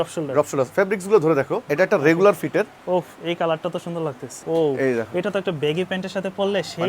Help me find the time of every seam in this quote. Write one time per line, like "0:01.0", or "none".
0:01.6
0:04.4